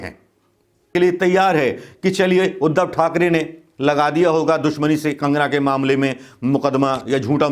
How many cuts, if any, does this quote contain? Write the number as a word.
one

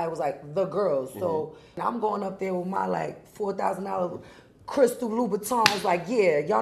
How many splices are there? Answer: one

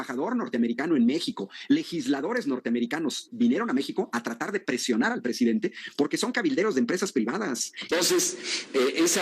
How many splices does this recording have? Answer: one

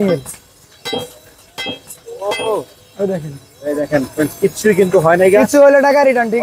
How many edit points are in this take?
zero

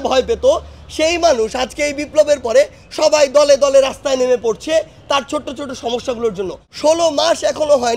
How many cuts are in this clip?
one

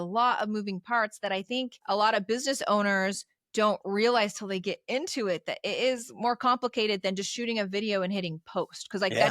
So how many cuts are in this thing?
one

